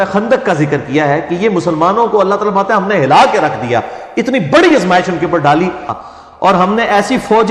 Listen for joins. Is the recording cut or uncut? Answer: cut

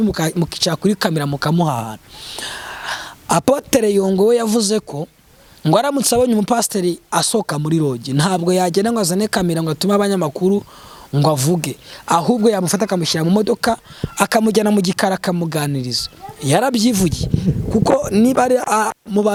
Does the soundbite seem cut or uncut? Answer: uncut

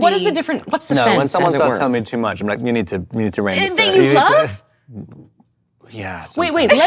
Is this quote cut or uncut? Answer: uncut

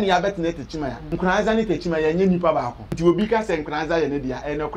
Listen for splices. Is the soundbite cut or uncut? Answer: cut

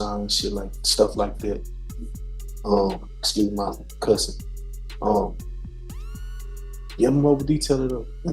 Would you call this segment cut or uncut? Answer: uncut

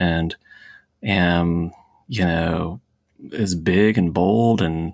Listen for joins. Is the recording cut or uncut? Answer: uncut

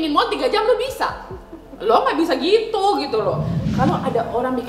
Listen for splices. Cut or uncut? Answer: cut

